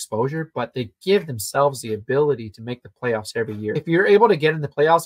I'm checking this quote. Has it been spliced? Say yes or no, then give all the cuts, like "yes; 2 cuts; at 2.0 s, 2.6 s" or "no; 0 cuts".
yes; 1 cut; at 3.8 s